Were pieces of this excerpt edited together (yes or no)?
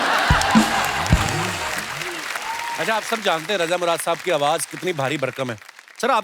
yes